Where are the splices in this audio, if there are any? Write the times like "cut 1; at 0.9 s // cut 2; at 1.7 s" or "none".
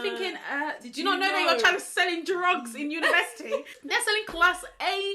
cut 1; at 3.7 s